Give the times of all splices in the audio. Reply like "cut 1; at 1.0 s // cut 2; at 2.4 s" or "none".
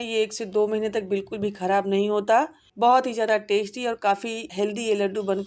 cut 1; at 4.4 s